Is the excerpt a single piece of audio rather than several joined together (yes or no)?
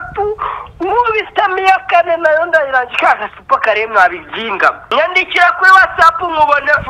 no